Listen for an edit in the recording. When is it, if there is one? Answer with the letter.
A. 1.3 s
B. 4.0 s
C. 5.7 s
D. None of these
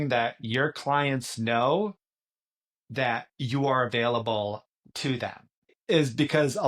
C